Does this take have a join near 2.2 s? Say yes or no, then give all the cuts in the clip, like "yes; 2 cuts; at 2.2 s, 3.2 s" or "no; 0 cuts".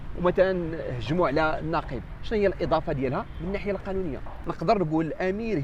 no; 1 cut; at 4.3 s